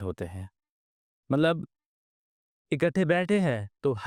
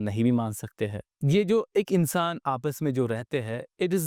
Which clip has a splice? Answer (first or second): second